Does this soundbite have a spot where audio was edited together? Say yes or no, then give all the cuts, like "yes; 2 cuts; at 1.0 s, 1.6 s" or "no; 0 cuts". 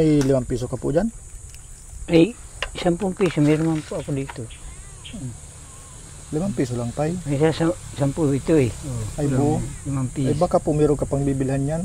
no; 0 cuts